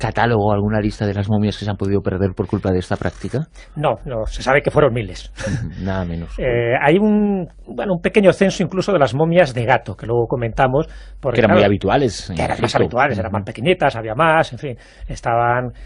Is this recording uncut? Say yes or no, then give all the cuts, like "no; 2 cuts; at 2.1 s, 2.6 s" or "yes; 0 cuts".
no; 1 cut; at 11.0 s